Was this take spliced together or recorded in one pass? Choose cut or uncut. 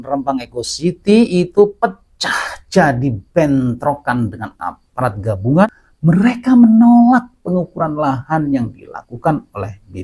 cut